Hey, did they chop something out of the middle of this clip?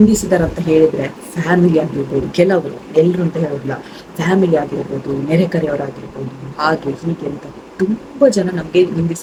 no; 0 cuts

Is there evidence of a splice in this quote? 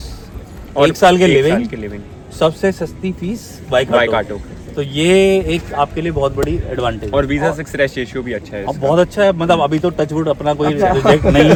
no; 0 cuts

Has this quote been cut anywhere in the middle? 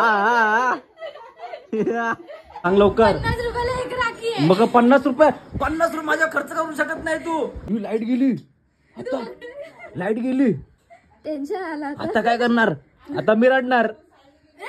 yes; 2 cuts; at 2.7 s, 7.6 s

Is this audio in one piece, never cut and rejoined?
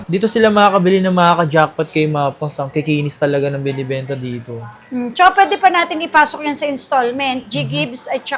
yes; 0 cuts

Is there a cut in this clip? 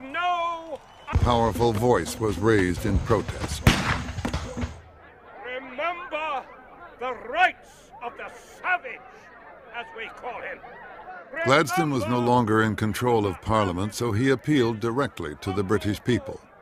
no; 0 cuts

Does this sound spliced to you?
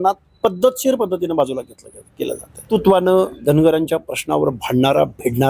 yes; 1 cut; at 2.7 s

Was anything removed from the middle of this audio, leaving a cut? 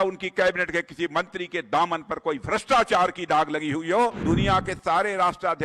yes; 1 cut; at 4.2 s

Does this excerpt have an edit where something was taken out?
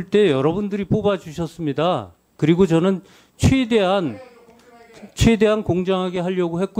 no; 0 cuts

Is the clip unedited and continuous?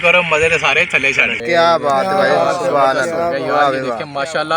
no; 1 cut; at 1.4 s

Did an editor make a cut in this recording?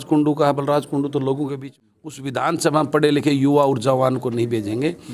yes; 1 cut; at 1.6 s

